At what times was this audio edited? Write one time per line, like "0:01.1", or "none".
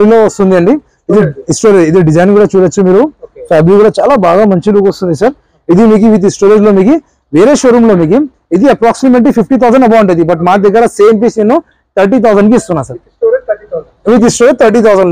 none